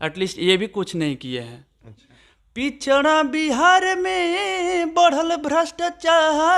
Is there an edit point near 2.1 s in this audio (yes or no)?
yes